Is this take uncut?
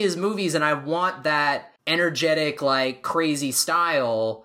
no; 1 cut; at 1.7 s

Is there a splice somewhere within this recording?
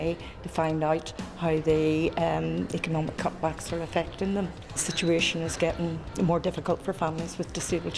yes; 2 cuts; at 4.8 s, 6.1 s

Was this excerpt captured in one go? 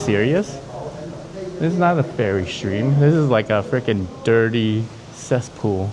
yes; 0 cuts

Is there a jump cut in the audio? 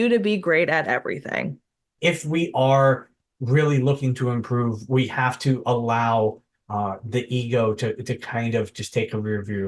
yes; 1 cut; at 1.8 s

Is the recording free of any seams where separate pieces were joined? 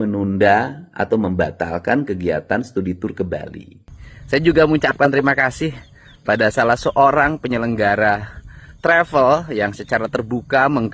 no; 1 cut; at 3.8 s

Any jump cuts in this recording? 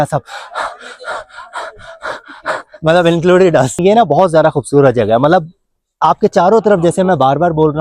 yes; 1 cut; at 3.7 s

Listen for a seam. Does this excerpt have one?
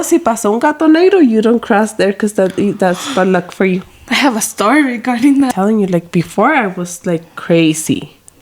yes; 1 cut; at 5.5 s

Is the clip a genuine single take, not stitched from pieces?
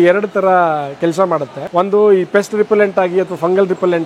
no; 1 cut; at 1.6 s

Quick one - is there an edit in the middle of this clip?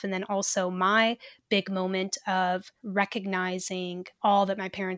yes; 2 cuts; at 2.8 s, 4.0 s

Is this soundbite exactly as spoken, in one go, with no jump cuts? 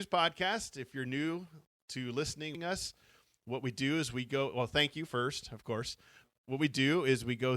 no; 2 cuts; at 2.6 s, 6.2 s

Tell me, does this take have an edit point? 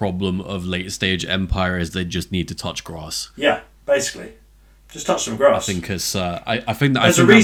no; 0 cuts

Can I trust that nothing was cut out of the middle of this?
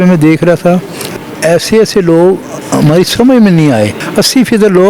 no; 2 cuts; at 1.3 s, 4.0 s

